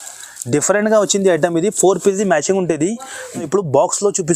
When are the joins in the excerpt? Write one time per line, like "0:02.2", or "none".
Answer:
0:03.4